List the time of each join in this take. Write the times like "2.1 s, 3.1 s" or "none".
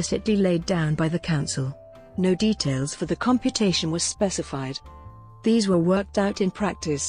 none

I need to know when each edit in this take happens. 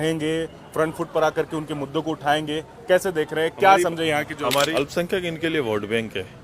4.7 s

